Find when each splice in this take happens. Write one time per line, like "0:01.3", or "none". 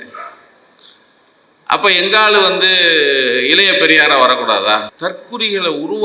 0:04.9